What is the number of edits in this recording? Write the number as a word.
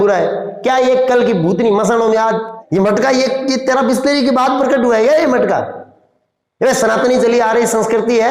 one